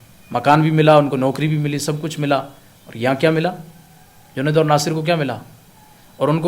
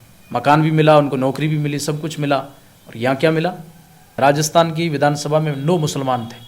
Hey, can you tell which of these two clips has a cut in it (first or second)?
second